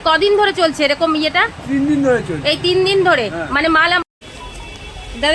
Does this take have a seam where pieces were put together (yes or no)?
yes